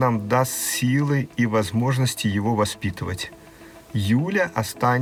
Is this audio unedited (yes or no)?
yes